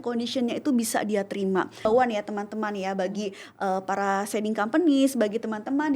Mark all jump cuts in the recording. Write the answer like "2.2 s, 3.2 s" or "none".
1.9 s

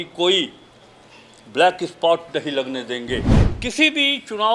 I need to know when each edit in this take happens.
3.4 s

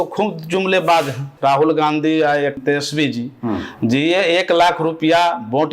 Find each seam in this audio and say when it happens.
1.3 s, 2.6 s

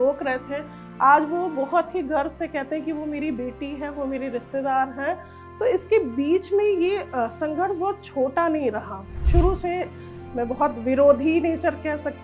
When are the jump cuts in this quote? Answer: 9.2 s

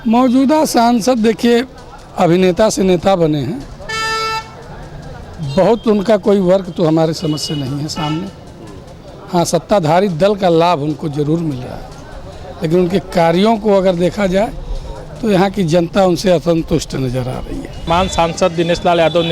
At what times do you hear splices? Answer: 17.9 s

